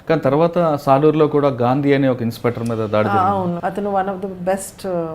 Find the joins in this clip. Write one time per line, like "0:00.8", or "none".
0:03.6